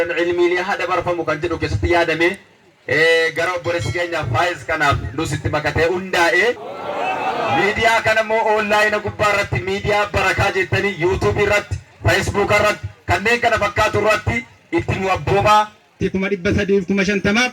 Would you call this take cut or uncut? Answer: cut